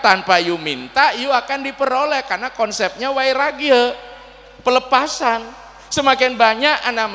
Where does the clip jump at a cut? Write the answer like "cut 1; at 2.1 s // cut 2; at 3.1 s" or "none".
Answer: none